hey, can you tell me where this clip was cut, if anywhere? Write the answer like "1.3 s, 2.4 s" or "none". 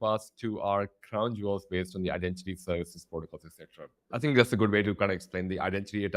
none